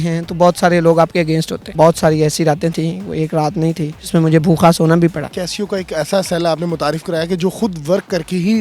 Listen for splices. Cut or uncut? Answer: cut